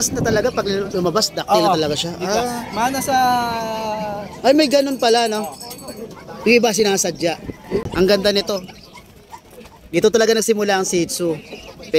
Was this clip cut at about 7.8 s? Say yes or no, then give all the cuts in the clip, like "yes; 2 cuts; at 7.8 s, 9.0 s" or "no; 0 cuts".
yes; 1 cut; at 7.8 s